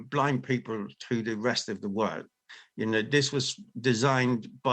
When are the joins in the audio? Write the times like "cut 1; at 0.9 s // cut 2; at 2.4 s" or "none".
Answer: none